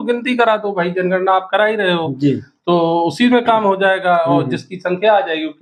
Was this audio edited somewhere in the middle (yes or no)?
no